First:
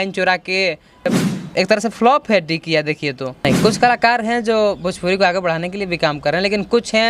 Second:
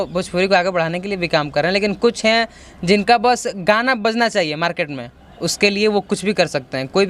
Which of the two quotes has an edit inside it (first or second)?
first